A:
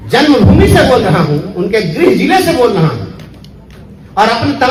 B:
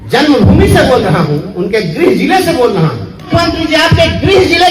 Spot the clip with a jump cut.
B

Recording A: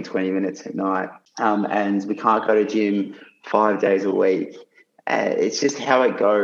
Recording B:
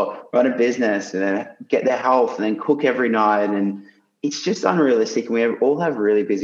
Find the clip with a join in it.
A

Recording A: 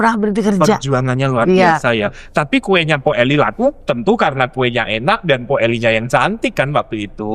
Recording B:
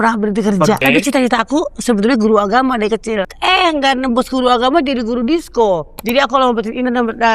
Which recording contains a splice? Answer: B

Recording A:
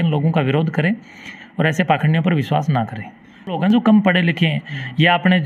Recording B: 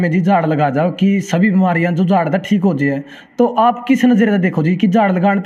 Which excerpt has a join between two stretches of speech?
A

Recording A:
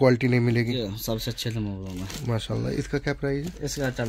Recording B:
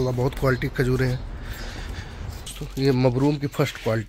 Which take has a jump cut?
B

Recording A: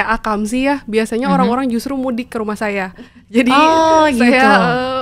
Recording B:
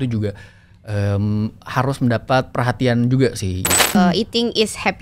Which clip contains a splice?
B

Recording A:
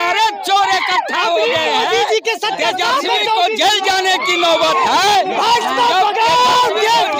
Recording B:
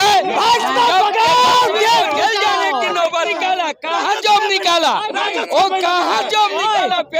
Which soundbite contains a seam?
B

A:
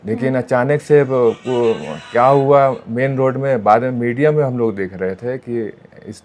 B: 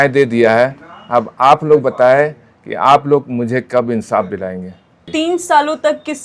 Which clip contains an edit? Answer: B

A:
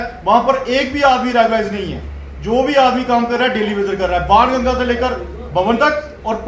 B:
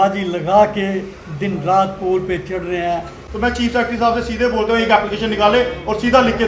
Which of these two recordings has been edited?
B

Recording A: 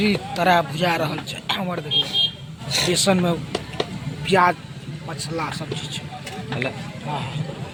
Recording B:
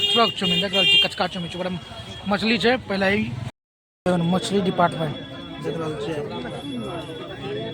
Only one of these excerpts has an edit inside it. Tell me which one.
B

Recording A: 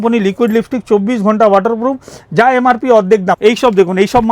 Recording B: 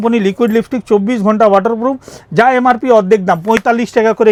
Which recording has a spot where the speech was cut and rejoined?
A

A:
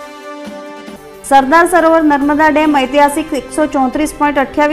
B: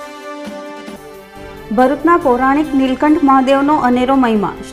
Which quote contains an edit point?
A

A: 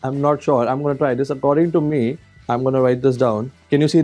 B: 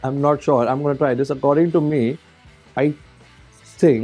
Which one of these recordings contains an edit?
A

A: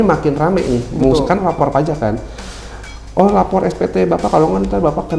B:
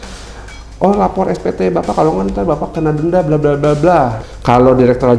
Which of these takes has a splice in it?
B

